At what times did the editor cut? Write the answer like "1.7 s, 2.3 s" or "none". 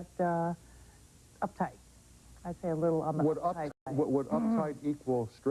3.7 s